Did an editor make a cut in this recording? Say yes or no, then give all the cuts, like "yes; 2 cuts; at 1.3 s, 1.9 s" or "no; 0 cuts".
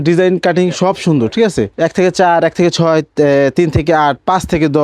yes; 1 cut; at 1.7 s